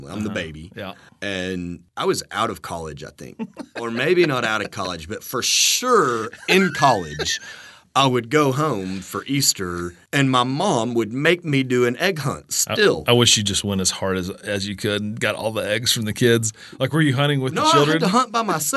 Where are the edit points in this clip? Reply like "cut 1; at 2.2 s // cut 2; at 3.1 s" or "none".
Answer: cut 1; at 1.0 s // cut 2; at 1.8 s // cut 3; at 3.7 s // cut 4; at 10.0 s